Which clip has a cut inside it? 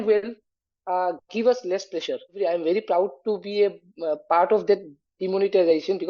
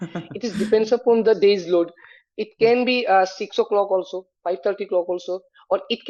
first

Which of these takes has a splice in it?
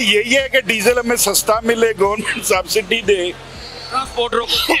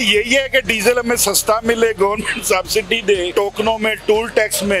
second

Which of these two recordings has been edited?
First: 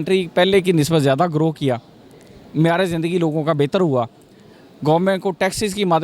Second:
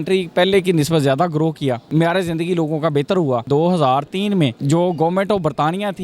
second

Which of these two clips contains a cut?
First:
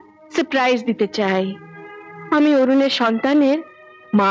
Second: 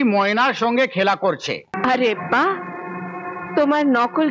second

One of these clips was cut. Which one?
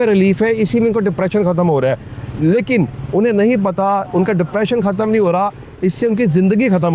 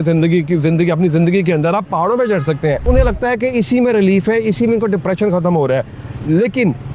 second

